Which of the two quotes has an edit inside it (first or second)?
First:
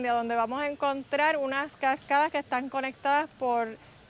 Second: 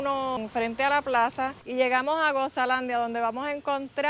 second